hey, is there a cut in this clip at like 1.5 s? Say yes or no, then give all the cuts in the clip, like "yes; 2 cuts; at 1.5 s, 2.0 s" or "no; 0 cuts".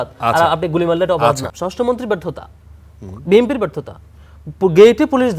yes; 1 cut; at 1.5 s